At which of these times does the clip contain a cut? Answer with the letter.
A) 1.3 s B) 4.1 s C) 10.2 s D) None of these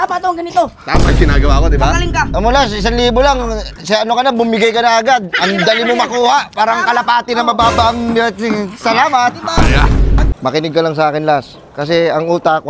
C